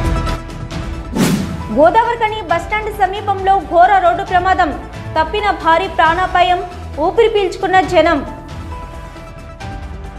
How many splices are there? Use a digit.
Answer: 1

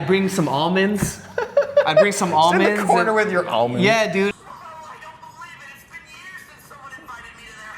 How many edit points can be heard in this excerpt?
1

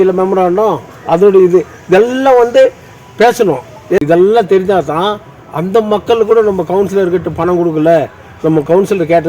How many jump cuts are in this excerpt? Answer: 1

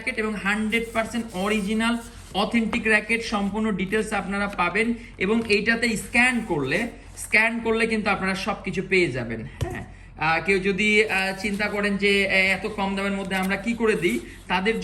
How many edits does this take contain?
0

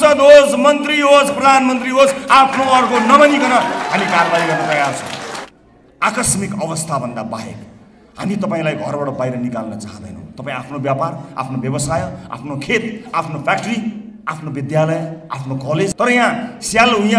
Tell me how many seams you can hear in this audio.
2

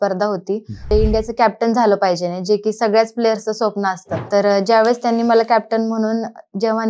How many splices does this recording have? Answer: 2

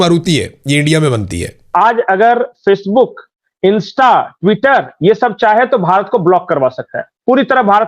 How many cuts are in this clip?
1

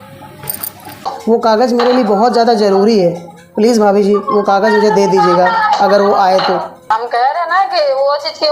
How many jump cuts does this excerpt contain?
2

